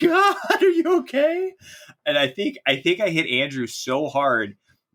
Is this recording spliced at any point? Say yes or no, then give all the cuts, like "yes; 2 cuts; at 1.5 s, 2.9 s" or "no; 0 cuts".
no; 0 cuts